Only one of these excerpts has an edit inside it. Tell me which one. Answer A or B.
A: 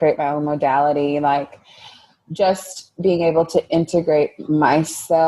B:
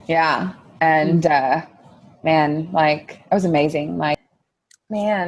B